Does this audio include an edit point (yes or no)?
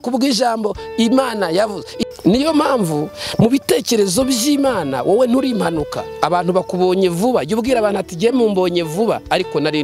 yes